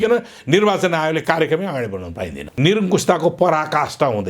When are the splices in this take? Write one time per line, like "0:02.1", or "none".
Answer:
0:02.4